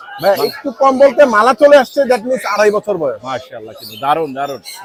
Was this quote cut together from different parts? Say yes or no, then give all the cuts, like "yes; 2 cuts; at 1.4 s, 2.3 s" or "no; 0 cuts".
no; 0 cuts